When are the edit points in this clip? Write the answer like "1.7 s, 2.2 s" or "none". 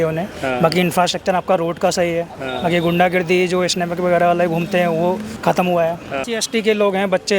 5.3 s, 6.2 s